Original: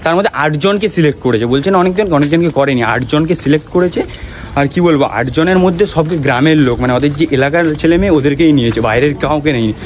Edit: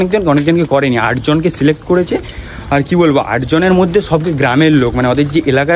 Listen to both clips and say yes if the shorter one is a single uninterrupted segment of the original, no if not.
yes